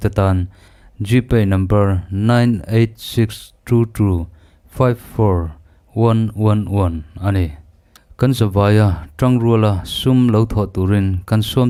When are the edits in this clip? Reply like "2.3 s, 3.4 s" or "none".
none